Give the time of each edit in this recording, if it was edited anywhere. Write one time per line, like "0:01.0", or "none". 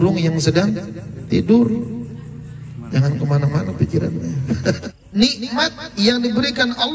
0:04.9